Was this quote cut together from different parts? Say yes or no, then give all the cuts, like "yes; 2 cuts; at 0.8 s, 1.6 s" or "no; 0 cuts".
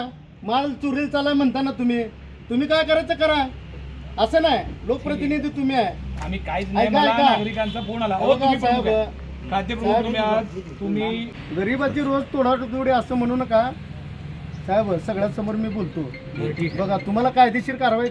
yes; 1 cut; at 11.3 s